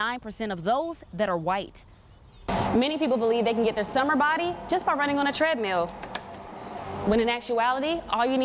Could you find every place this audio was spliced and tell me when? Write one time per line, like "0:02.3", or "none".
0:02.3

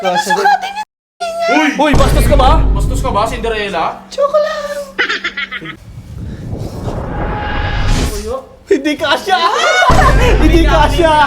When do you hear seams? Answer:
0:05.6

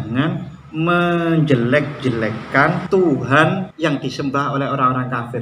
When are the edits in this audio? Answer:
0:02.8
0:03.7

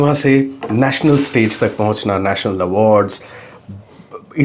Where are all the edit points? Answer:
none

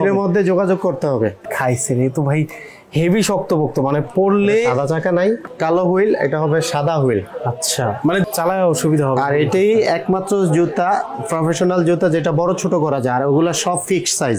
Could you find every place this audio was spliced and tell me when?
0:01.4
0:05.5
0:08.2

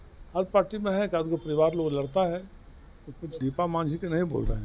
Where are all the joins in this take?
0:03.3

